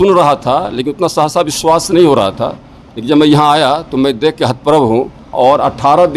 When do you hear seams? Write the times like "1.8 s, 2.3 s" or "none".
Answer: 5.3 s